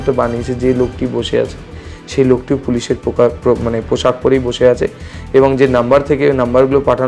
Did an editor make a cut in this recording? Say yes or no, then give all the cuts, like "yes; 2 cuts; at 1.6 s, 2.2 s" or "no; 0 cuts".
no; 0 cuts